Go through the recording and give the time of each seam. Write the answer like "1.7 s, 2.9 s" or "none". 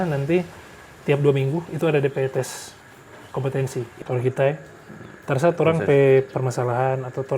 3.9 s